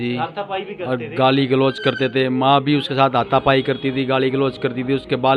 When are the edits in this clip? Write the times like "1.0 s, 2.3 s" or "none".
none